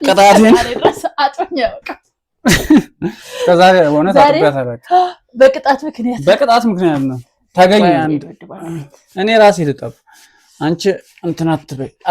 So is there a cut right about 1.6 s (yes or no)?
no